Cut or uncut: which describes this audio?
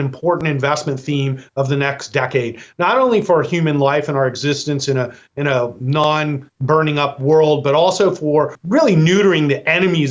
cut